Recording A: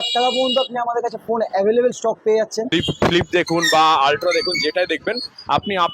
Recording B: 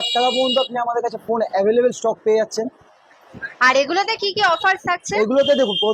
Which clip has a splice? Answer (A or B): A